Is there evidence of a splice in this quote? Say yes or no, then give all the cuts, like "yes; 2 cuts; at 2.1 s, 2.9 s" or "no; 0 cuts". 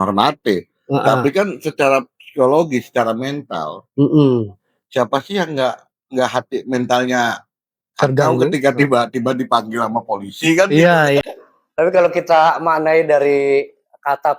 yes; 1 cut; at 11.3 s